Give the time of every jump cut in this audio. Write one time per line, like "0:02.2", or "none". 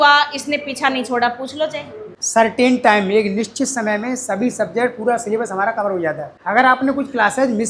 0:02.2